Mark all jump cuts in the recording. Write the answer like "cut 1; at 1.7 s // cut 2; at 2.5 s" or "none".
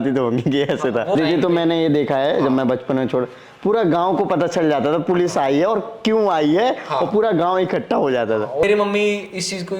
cut 1; at 1.1 s // cut 2; at 8.6 s